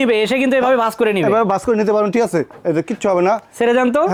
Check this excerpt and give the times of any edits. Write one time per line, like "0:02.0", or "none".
none